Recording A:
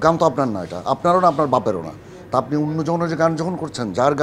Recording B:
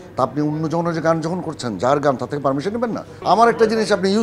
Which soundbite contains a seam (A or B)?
B